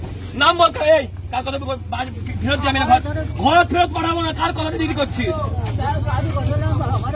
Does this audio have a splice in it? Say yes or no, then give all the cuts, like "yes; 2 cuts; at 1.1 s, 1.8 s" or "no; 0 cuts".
no; 0 cuts